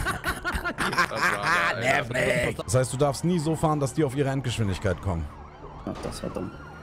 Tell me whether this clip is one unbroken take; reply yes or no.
no